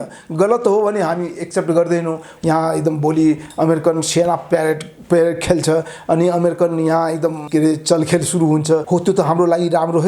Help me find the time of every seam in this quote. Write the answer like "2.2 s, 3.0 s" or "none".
2.3 s, 7.4 s, 8.8 s